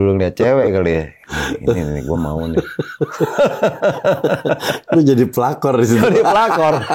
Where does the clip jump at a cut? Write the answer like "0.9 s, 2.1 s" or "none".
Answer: none